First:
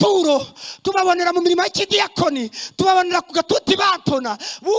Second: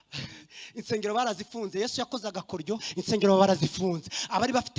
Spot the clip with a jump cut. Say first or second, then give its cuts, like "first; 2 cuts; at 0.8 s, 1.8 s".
second; 1 cut; at 2.9 s